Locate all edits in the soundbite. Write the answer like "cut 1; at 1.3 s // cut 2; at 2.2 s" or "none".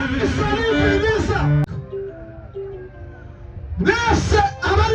cut 1; at 1.7 s